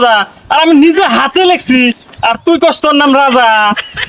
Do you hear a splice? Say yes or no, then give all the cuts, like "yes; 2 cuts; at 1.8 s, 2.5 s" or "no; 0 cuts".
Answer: no; 0 cuts